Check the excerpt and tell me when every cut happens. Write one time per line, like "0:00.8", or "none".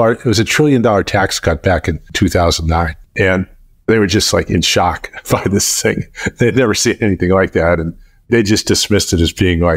0:03.0